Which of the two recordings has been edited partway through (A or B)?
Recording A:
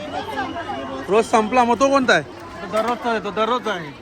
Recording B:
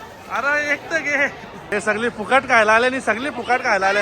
B